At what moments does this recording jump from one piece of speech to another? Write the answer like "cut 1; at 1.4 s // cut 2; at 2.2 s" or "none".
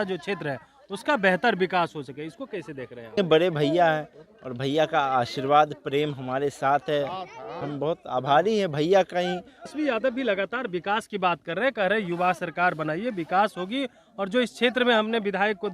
cut 1; at 3.2 s // cut 2; at 7.6 s // cut 3; at 9.7 s